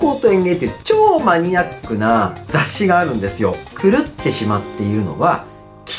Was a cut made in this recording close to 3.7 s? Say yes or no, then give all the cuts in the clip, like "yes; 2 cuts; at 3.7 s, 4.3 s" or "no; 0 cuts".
yes; 2 cuts; at 2.4 s, 3.7 s